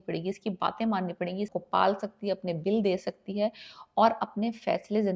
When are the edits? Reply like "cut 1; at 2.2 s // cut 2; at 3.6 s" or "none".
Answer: cut 1; at 1.5 s